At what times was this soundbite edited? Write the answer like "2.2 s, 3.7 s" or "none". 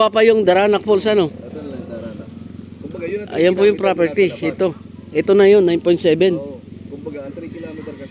none